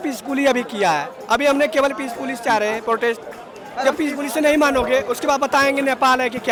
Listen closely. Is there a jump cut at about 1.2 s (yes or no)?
no